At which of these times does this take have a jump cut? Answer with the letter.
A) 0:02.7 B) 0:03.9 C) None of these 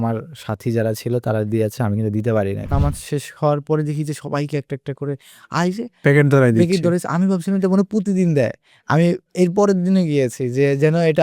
A